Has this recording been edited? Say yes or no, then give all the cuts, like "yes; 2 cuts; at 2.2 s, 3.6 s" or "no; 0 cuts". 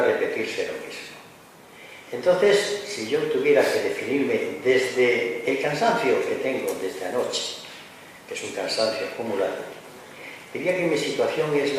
yes; 1 cut; at 6.9 s